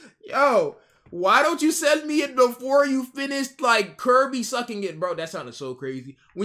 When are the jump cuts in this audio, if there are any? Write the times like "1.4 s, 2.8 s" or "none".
none